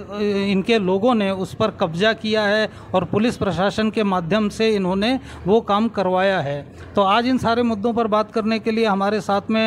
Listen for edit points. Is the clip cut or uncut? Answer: uncut